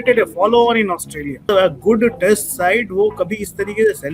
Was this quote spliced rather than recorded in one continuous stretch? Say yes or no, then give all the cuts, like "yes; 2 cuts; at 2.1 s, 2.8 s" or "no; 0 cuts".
yes; 1 cut; at 1.5 s